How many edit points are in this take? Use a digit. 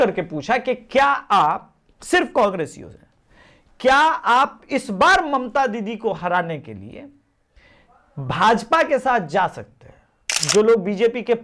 1